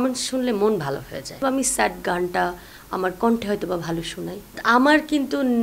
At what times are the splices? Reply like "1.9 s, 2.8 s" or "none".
1.4 s, 4.5 s